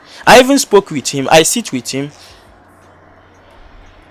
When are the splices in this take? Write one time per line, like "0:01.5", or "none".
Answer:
none